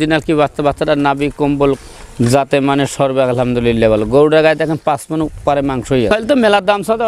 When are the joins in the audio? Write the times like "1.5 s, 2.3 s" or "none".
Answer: 6.1 s